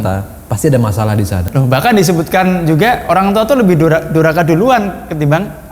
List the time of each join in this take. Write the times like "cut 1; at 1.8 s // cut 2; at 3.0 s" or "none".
cut 1; at 1.5 s